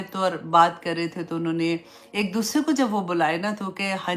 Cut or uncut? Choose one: uncut